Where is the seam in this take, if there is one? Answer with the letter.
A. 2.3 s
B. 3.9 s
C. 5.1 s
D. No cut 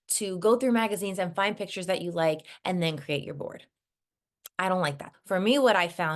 C